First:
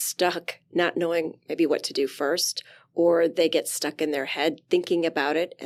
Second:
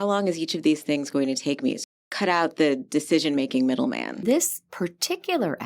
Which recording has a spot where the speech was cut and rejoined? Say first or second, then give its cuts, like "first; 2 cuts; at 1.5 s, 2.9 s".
second; 2 cuts; at 1.9 s, 4.2 s